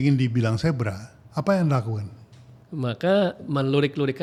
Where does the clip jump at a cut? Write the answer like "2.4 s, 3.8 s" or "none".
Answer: none